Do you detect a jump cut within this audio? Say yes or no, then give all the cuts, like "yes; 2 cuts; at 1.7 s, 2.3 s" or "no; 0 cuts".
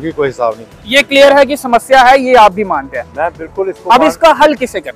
no; 0 cuts